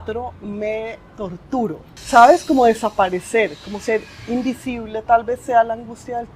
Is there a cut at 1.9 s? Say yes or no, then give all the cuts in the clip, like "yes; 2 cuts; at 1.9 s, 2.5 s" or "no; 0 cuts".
yes; 1 cut; at 1.9 s